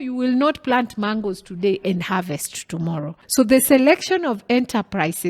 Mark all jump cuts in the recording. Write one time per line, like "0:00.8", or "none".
0:03.2